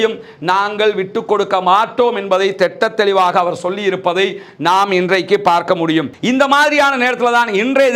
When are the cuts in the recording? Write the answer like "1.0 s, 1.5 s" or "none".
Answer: 6.2 s

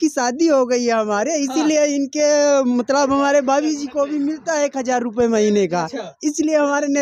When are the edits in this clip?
none

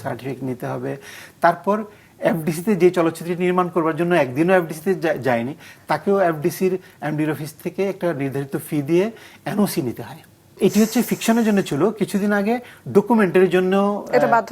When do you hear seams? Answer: 10.6 s

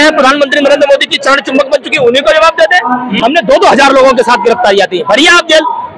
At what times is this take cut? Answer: 3.2 s

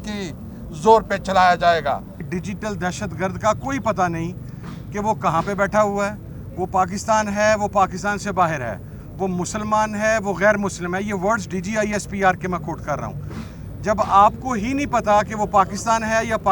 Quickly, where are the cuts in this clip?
2.2 s

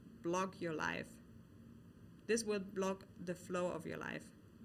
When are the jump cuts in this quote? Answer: none

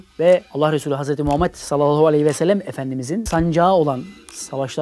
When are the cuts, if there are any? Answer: 3.2 s

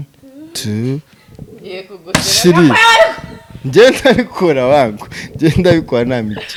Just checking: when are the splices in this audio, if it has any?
none

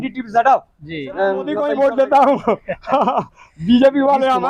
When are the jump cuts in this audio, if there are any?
1.5 s

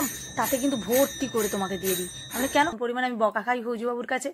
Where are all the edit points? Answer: 2.8 s

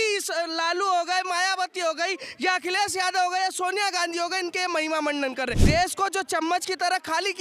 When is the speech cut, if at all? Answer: 5.6 s

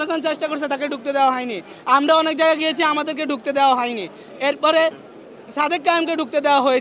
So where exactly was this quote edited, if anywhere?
none

